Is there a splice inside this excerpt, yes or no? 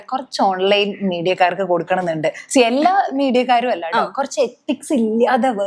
no